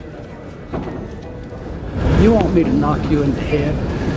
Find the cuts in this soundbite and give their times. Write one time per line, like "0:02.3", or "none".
none